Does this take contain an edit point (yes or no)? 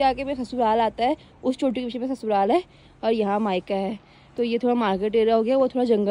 no